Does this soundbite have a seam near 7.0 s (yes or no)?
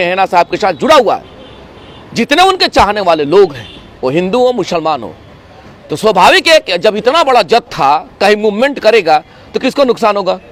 no